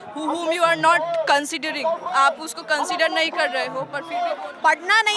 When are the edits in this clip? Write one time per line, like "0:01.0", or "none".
0:04.0